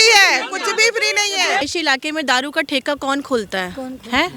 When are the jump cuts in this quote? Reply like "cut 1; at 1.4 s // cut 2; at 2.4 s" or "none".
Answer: cut 1; at 1.6 s